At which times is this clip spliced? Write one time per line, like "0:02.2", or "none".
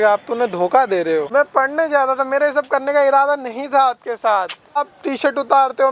0:01.3
0:04.8